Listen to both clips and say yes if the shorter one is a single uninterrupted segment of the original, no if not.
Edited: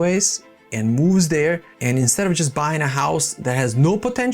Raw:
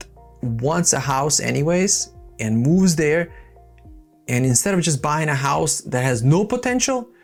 no